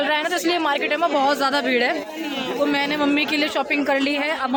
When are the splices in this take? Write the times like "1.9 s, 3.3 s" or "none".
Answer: none